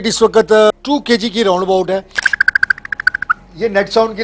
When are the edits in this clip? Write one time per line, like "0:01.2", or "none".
0:00.7
0:02.3